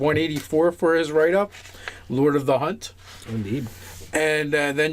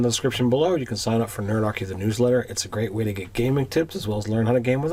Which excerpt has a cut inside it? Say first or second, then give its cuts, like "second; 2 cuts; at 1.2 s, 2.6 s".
first; 1 cut; at 2.4 s